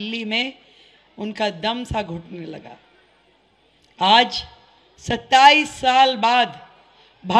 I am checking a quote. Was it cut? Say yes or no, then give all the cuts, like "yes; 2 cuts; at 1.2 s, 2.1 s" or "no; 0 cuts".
no; 0 cuts